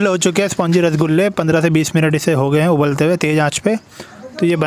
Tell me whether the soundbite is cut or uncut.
uncut